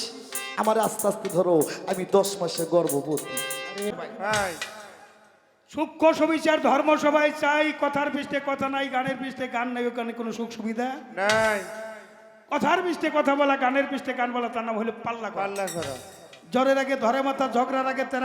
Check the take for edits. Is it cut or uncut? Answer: cut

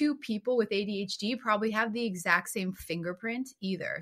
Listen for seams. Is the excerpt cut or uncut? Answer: uncut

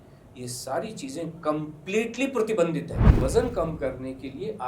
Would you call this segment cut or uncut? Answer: cut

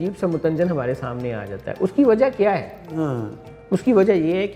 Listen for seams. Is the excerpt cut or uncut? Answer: uncut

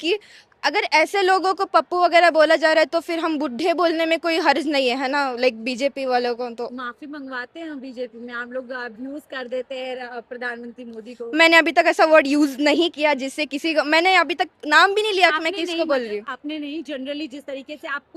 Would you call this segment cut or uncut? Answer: uncut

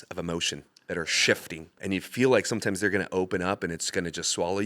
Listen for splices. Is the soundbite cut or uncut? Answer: cut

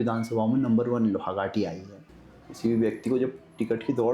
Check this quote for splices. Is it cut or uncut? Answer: cut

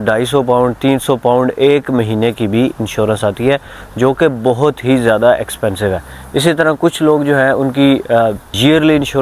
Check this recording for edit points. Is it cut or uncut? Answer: uncut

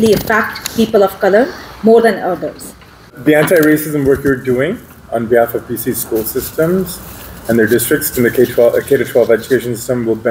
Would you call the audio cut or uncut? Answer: cut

